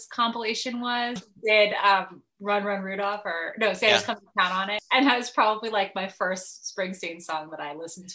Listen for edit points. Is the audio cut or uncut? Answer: cut